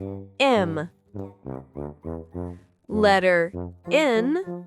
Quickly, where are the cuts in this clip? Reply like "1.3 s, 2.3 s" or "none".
0.9 s, 2.8 s